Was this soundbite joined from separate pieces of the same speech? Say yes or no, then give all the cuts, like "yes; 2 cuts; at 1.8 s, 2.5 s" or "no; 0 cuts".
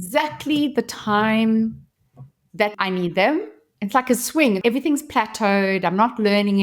yes; 3 cuts; at 2.7 s, 3.6 s, 4.6 s